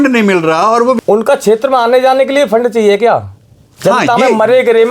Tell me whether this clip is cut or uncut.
cut